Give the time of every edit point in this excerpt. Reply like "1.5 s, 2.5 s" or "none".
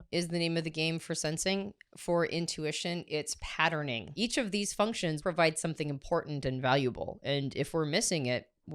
4.1 s, 5.2 s